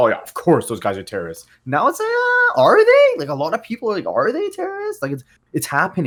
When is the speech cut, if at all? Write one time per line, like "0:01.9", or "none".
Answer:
none